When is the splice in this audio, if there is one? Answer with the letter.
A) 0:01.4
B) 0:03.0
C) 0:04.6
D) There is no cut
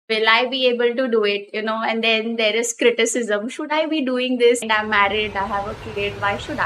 C